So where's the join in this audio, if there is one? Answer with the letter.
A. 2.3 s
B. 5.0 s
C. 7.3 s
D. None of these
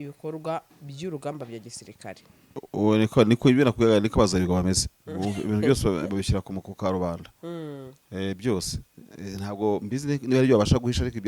A